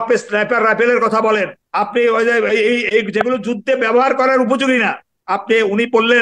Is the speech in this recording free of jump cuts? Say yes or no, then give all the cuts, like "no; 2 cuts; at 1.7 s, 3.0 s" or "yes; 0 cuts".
no; 1 cut; at 1.6 s